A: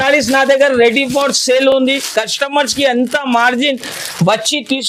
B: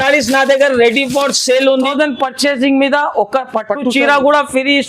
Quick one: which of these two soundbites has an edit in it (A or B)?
B